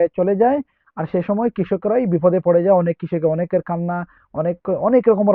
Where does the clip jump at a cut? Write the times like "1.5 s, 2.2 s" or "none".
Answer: none